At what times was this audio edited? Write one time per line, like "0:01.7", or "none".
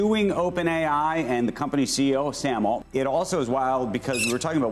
none